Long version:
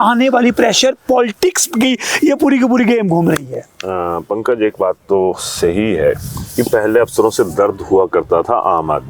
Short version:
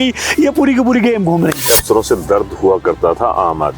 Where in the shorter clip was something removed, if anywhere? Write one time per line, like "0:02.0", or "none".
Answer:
0:01.7